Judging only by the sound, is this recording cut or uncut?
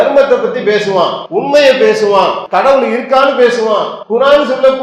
cut